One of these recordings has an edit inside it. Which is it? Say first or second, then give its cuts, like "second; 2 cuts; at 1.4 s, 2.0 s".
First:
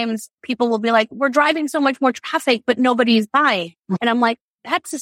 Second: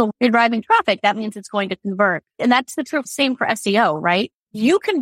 second; 1 cut; at 2.4 s